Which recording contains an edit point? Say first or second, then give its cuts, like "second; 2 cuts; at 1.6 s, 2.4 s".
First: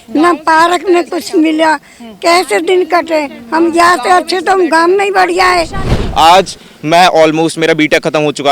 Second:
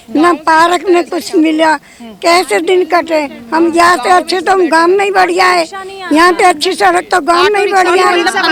first; 1 cut; at 5.9 s